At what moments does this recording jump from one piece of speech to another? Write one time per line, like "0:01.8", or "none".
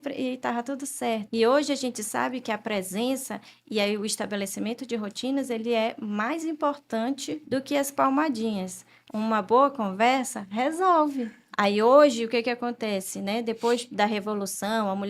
0:01.3
0:07.4
0:11.4